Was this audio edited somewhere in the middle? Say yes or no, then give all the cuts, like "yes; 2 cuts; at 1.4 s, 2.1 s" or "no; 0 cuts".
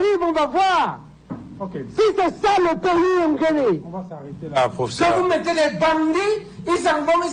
no; 0 cuts